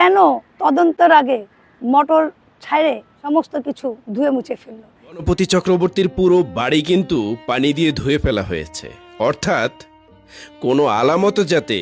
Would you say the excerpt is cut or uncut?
cut